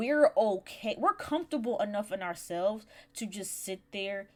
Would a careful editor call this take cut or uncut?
uncut